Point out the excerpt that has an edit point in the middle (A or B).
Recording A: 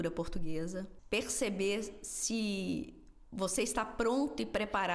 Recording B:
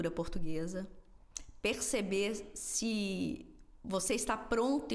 A